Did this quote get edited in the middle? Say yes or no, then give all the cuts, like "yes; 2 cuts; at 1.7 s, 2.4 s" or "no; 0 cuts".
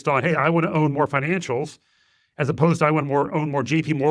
no; 0 cuts